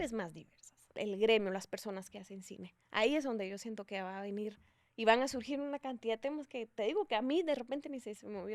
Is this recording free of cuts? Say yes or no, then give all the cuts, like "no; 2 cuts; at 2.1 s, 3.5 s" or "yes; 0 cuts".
no; 1 cut; at 0.9 s